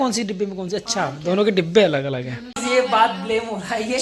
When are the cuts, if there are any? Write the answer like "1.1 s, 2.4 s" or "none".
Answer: 2.5 s